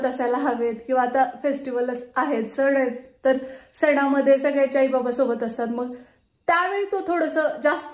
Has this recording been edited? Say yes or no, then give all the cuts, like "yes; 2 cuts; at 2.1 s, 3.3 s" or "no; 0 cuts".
no; 0 cuts